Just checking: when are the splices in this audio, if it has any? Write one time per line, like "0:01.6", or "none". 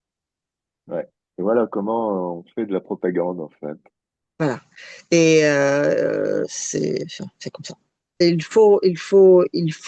none